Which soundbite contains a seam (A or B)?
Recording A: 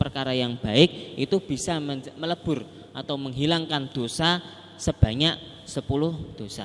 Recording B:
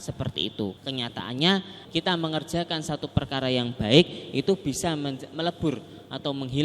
B